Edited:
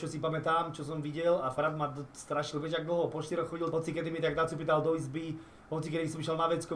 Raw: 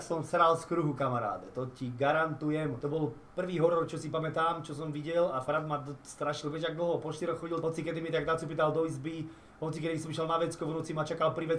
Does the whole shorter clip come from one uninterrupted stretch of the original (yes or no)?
yes